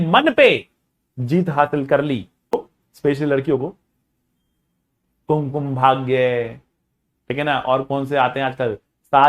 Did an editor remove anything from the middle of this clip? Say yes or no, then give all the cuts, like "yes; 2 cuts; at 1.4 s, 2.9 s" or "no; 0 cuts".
yes; 1 cut; at 2.5 s